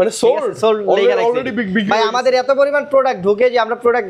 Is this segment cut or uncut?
uncut